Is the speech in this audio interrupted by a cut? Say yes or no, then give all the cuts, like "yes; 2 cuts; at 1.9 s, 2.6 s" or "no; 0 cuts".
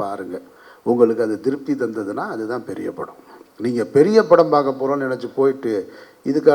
no; 0 cuts